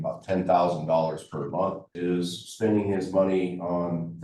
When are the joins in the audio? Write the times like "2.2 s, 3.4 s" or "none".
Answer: 1.9 s